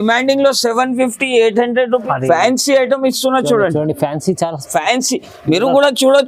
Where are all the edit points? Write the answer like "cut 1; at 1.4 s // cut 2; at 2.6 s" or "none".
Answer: cut 1; at 2.0 s